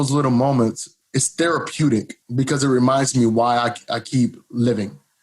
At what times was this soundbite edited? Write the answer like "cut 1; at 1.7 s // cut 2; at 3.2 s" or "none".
cut 1; at 0.9 s // cut 2; at 2.2 s